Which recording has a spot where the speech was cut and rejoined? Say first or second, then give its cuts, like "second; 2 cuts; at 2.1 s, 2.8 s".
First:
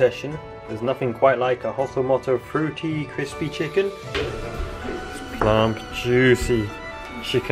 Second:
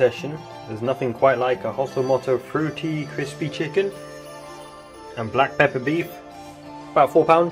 first; 1 cut; at 4.0 s